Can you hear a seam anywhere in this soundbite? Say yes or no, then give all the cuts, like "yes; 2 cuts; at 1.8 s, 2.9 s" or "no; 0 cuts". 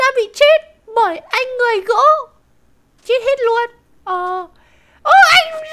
no; 0 cuts